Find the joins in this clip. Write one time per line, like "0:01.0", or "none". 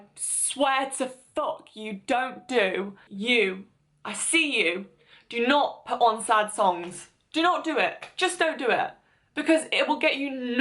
0:03.0